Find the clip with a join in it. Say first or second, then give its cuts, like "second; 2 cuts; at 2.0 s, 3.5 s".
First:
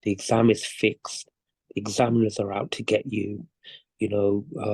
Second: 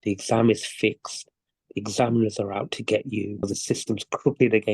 second; 1 cut; at 3.5 s